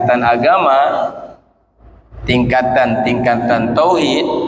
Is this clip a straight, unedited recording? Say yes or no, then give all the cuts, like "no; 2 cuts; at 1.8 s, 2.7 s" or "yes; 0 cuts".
yes; 0 cuts